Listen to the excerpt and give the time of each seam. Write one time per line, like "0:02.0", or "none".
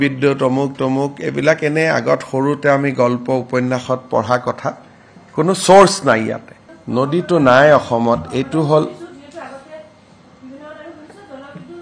0:06.3